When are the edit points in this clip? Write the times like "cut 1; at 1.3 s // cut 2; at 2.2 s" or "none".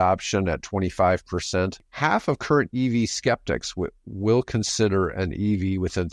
cut 1; at 1.8 s